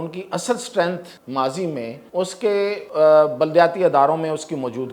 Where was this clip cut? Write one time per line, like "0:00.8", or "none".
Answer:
0:01.1
0:02.0
0:02.8